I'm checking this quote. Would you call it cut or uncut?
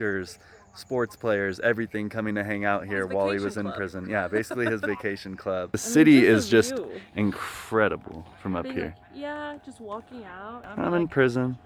uncut